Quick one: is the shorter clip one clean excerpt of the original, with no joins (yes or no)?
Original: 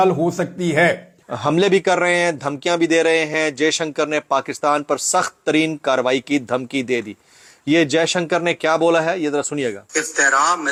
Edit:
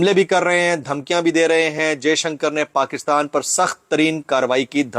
yes